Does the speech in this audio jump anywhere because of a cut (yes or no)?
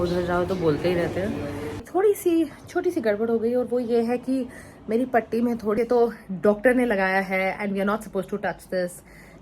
yes